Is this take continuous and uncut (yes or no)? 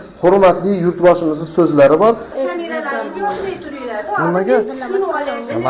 no